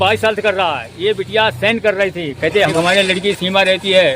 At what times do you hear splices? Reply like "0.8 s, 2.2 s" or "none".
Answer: 2.7 s